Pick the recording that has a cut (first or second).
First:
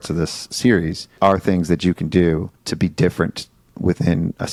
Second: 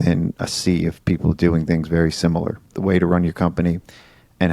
second